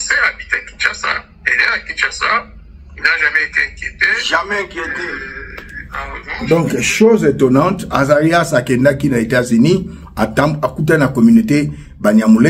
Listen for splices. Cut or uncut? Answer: uncut